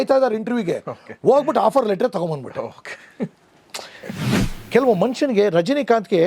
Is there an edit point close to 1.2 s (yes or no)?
no